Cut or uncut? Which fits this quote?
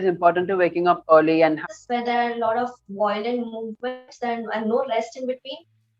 cut